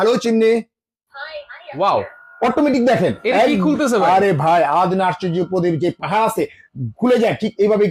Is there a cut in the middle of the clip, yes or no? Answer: no